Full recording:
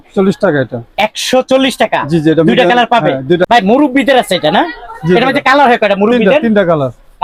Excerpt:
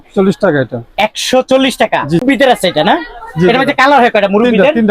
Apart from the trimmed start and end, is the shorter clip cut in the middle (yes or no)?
yes